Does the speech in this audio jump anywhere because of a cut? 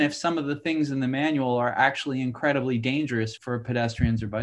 yes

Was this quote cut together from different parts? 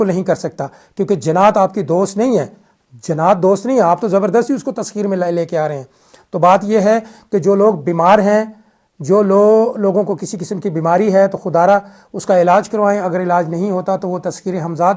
no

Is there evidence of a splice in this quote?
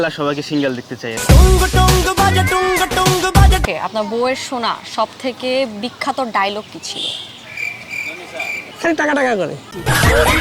yes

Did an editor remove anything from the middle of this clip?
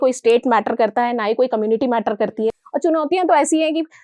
yes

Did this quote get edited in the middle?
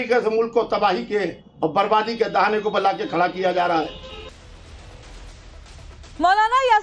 yes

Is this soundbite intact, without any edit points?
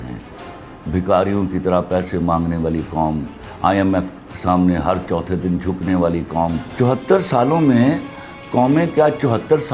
no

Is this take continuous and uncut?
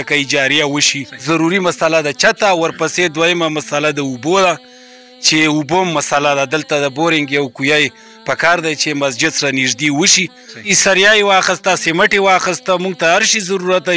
no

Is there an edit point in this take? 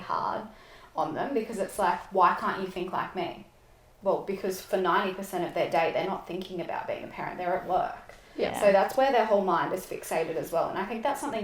no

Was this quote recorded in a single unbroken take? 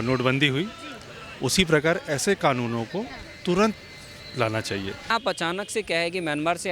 no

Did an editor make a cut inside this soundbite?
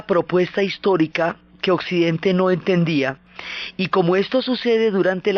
no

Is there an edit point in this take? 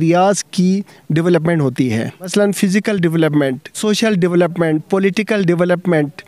yes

